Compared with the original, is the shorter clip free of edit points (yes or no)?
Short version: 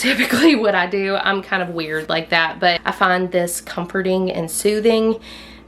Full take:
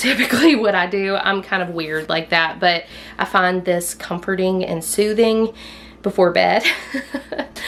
no